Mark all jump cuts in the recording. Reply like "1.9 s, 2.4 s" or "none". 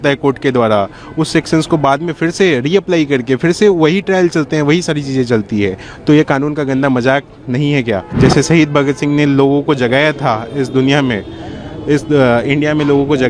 8.1 s